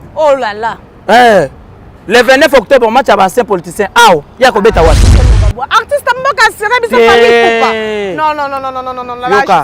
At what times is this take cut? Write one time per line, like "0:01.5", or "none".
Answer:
none